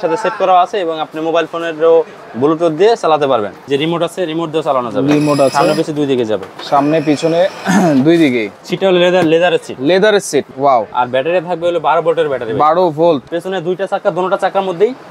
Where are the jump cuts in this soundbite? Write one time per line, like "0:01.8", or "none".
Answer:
0:03.7
0:08.6
0:10.5
0:13.3

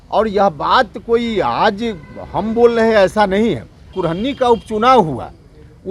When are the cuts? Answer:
0:04.0

